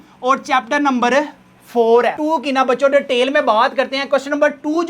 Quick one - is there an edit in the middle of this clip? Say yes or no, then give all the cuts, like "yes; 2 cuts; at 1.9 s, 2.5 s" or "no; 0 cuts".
yes; 1 cut; at 2.2 s